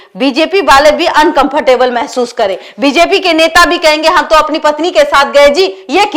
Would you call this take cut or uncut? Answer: uncut